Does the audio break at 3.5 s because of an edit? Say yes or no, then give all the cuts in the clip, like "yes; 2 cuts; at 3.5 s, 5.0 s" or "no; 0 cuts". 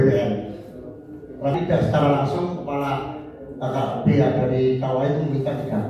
no; 1 cut; at 1.5 s